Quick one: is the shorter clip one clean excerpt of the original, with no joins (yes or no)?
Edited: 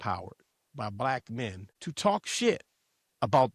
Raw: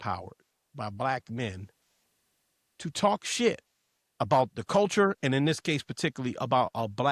no